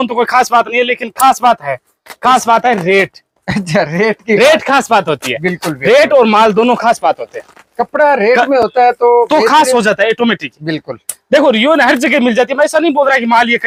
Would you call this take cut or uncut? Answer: uncut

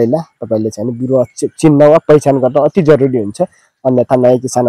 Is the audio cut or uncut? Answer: uncut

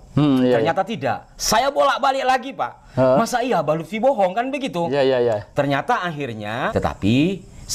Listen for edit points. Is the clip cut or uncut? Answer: cut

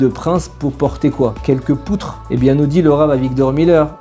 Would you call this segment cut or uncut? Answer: uncut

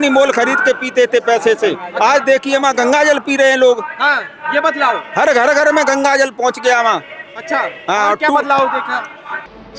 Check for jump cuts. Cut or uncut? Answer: uncut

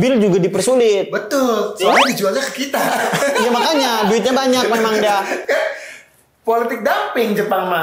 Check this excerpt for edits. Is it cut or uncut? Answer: uncut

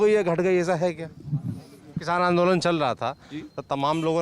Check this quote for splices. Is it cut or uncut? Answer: cut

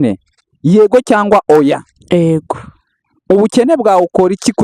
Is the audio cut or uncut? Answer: uncut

